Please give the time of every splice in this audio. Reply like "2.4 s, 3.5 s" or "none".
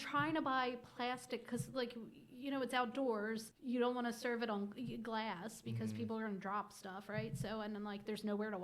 3.5 s